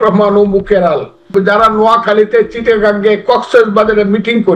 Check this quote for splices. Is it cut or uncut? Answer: cut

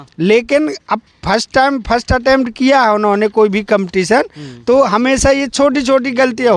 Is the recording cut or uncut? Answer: uncut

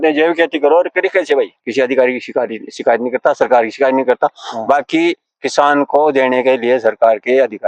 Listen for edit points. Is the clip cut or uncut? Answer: cut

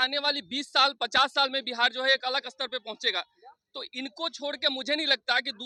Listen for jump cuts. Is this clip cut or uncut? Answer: uncut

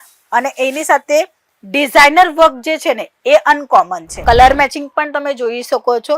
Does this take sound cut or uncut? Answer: cut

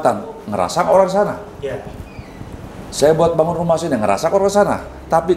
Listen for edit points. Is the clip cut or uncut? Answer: uncut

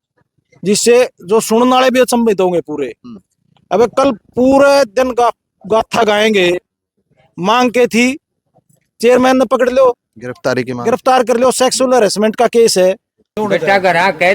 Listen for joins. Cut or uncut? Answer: cut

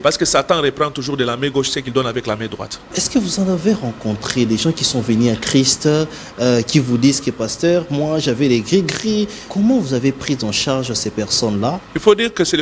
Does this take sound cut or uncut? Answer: cut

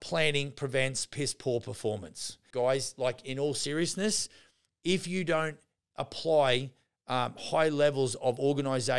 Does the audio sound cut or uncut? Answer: cut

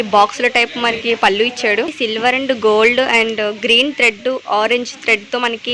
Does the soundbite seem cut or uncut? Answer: cut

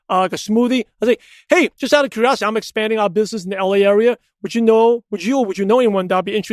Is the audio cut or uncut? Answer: uncut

